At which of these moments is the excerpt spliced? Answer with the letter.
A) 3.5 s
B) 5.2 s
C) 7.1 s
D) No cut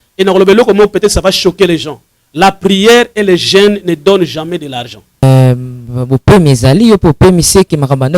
B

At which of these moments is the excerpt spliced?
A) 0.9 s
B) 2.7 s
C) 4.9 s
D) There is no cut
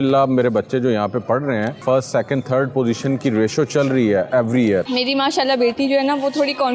C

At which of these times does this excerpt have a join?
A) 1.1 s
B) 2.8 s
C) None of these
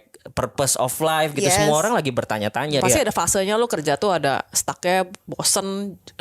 B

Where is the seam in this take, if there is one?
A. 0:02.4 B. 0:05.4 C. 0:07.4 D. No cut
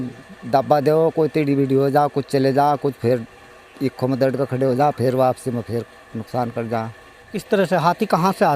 C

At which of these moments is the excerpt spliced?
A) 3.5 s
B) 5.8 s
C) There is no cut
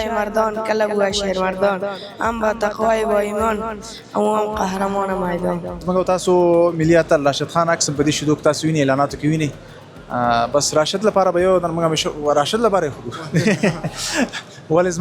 B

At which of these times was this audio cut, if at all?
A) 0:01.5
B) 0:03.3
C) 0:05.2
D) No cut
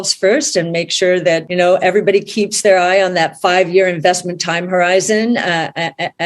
A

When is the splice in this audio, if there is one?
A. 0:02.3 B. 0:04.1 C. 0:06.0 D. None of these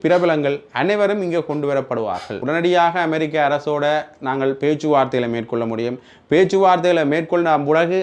A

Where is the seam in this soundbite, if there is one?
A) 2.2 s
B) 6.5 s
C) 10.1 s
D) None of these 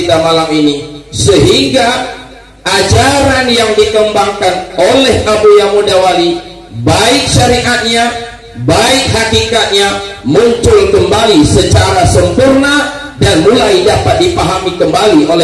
D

